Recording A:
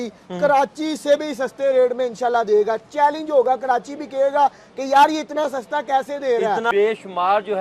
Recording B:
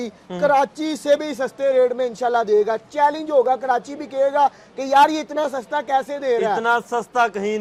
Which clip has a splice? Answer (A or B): A